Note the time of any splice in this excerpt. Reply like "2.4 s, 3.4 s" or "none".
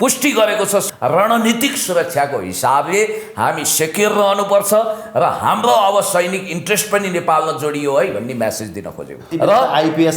0.9 s, 9.3 s